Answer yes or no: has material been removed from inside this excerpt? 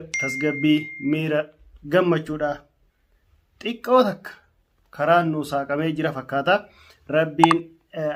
no